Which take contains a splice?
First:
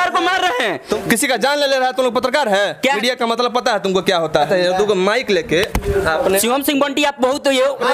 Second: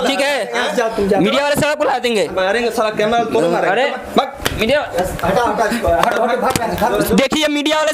first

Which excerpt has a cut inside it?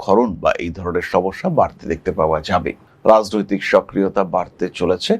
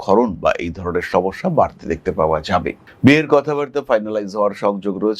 first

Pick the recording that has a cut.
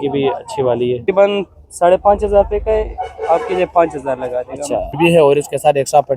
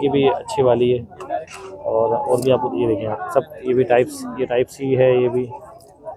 first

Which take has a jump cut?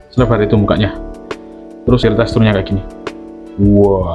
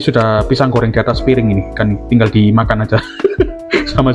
first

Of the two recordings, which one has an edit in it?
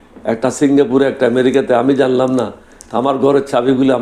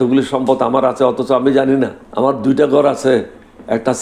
second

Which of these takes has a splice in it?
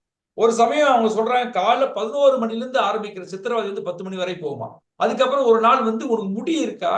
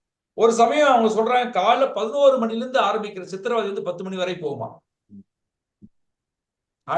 first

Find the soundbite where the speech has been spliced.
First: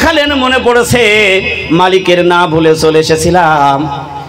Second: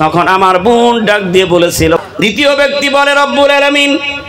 second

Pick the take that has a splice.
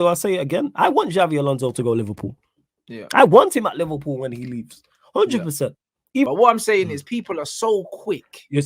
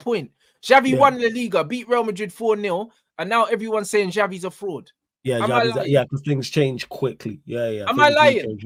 first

